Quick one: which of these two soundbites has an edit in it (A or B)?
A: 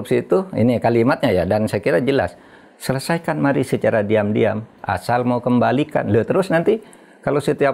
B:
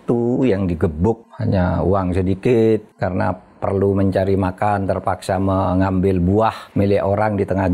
B